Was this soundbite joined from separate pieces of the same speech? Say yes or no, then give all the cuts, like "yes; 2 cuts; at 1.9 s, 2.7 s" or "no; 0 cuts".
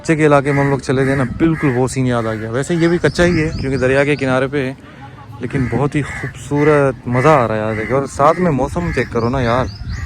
no; 0 cuts